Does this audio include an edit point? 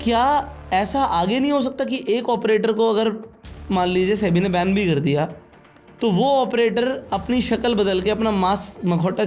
no; 0 cuts

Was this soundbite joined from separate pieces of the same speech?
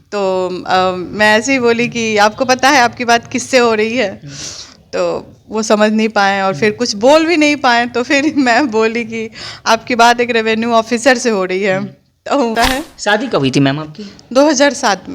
yes; 1 cut; at 12.5 s

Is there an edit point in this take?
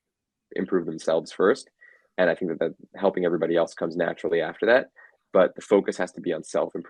no; 0 cuts

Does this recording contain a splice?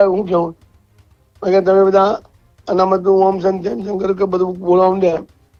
no; 0 cuts

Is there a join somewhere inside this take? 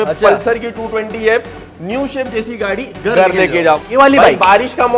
yes; 1 cut; at 3.8 s

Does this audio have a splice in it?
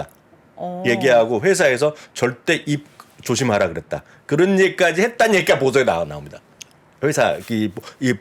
no; 0 cuts

